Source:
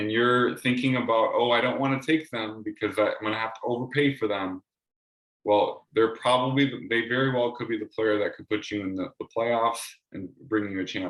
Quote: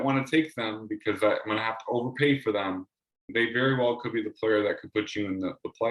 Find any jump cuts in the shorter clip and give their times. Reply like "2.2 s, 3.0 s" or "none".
3.2 s